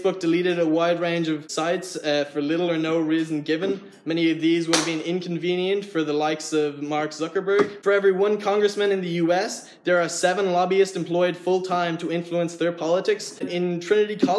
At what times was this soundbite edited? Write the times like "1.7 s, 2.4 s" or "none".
1.5 s, 7.8 s, 13.4 s